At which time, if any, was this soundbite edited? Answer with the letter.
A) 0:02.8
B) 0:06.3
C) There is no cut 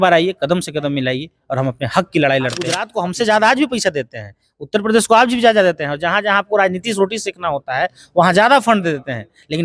A